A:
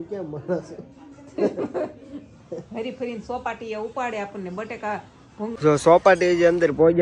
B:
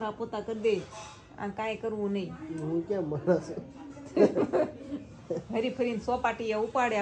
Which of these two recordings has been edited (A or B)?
A